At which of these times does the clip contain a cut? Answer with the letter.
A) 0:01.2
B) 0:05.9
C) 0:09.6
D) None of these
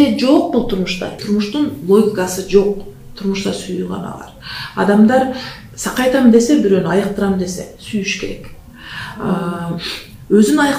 A